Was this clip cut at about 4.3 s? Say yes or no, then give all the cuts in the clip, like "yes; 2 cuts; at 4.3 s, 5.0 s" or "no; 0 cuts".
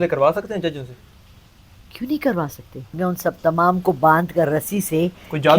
no; 1 cut; at 3.0 s